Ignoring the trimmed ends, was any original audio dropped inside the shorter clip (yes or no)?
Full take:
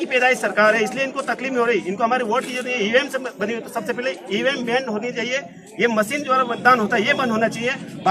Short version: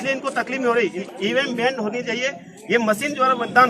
yes